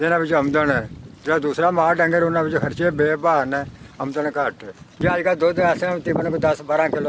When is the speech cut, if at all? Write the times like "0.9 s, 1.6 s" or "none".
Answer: 4.9 s